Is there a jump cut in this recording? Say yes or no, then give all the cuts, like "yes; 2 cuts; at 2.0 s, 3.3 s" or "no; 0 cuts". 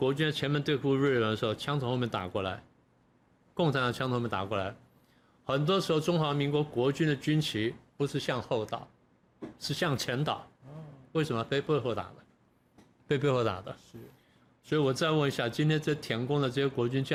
no; 0 cuts